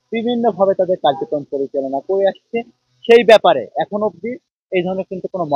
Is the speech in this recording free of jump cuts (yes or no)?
yes